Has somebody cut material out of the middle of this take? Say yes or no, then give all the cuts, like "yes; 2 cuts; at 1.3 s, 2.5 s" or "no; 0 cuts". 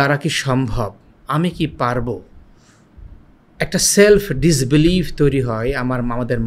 no; 0 cuts